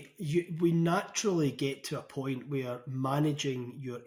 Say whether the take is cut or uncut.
uncut